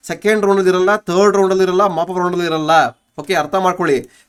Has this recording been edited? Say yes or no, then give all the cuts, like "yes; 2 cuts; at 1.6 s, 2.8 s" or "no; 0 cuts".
no; 0 cuts